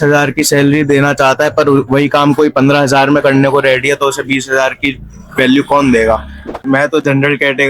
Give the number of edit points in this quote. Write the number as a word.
one